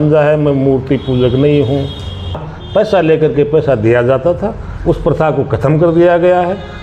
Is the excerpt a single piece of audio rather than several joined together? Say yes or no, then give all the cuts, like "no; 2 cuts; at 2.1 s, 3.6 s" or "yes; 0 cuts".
no; 1 cut; at 2.5 s